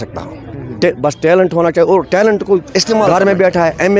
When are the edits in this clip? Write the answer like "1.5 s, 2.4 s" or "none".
3.1 s